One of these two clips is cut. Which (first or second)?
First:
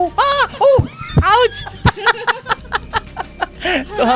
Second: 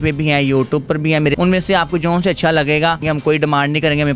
second